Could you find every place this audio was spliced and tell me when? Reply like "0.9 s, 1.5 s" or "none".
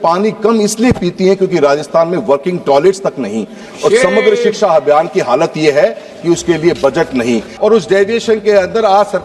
7.5 s